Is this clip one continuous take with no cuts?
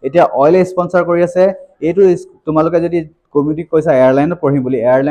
yes; 0 cuts

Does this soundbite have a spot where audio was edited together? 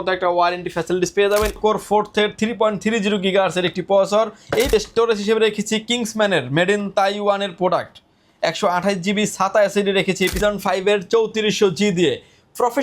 yes; 3 cuts; at 1.6 s, 4.7 s, 10.4 s

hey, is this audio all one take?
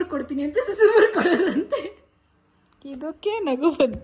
yes; 0 cuts

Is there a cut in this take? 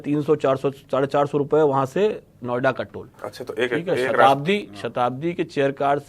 no; 0 cuts

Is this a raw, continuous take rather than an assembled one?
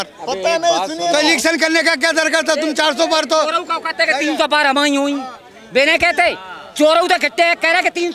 yes; 0 cuts

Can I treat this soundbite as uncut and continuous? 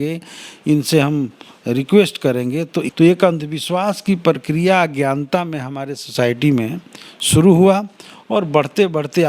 no; 1 cut; at 2.9 s

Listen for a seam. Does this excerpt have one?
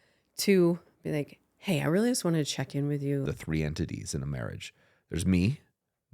yes; 1 cut; at 3.2 s

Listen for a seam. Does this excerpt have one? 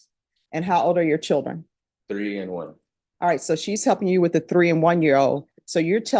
no; 0 cuts

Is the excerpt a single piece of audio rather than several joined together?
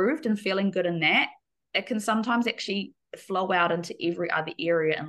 yes; 0 cuts

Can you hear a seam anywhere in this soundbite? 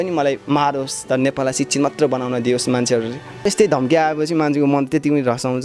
yes; 1 cut; at 3.4 s

